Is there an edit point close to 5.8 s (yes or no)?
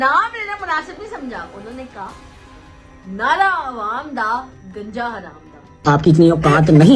yes